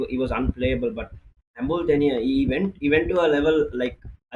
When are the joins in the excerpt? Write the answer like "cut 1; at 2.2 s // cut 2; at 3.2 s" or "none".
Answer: none